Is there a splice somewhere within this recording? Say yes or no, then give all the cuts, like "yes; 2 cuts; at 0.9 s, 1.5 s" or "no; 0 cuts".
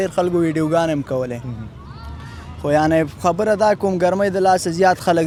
no; 0 cuts